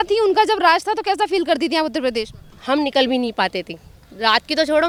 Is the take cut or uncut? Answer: uncut